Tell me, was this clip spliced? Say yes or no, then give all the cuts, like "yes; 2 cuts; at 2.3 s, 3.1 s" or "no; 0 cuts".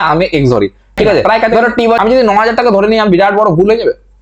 yes; 1 cut; at 2.0 s